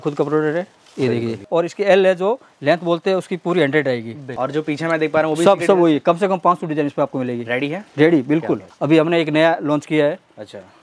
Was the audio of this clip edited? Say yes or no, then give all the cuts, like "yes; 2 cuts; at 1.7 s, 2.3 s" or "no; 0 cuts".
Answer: yes; 3 cuts; at 1.5 s, 4.2 s, 8.7 s